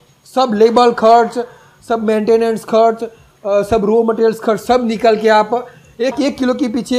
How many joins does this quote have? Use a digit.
1